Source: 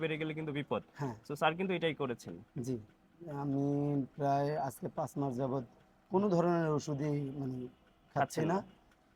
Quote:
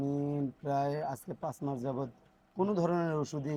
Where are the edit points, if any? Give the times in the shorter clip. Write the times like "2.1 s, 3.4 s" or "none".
none